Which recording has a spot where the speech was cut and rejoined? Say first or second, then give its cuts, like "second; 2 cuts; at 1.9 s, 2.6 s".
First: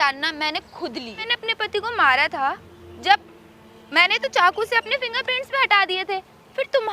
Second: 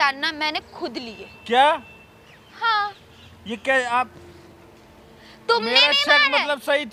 first; 1 cut; at 1.3 s